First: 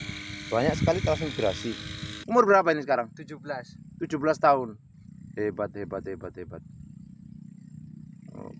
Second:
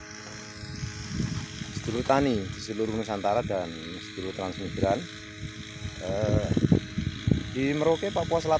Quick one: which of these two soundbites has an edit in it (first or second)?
first